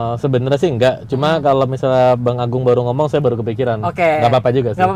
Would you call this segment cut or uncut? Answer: uncut